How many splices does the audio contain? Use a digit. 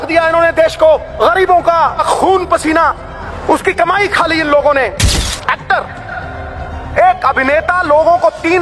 4